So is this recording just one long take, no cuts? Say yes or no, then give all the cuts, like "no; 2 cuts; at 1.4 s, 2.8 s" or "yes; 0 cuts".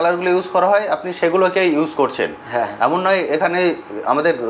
yes; 0 cuts